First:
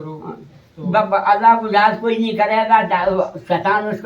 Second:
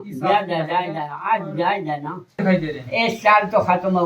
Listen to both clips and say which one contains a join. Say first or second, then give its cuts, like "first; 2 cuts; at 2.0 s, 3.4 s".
second; 1 cut; at 2.4 s